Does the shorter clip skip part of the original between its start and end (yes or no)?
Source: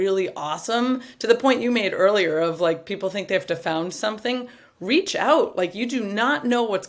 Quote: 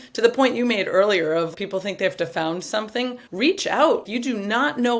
yes